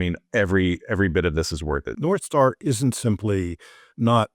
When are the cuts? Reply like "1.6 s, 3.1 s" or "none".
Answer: 1.9 s